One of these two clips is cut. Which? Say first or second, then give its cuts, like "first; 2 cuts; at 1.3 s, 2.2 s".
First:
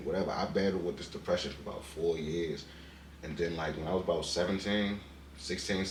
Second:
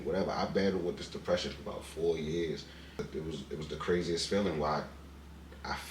second; 1 cut; at 3.1 s